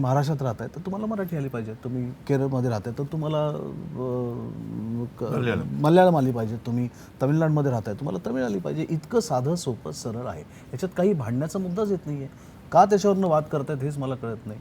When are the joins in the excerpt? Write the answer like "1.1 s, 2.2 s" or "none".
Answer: none